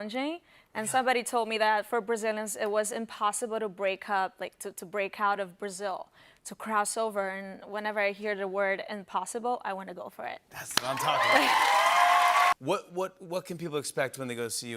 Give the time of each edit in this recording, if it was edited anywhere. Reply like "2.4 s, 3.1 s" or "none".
12.6 s